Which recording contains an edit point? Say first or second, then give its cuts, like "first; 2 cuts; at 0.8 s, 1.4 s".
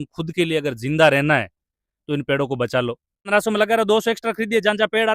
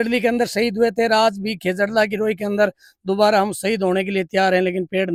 first; 1 cut; at 3.3 s